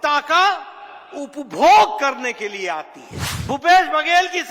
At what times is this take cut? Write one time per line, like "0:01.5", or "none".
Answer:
0:03.3